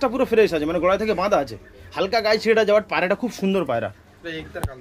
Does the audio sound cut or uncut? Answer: uncut